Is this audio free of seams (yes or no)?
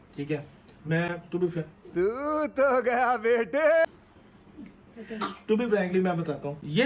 yes